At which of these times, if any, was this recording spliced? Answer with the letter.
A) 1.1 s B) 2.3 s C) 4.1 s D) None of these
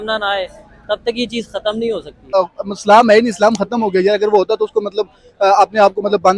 B